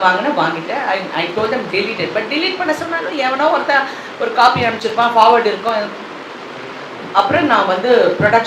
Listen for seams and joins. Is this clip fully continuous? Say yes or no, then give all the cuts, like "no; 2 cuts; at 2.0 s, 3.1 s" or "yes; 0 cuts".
yes; 0 cuts